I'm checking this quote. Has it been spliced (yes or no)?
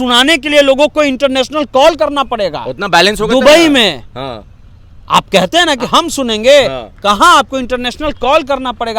no